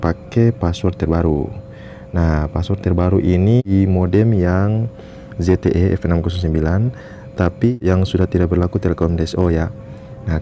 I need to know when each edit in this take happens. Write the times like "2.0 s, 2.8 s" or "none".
3.7 s, 7.7 s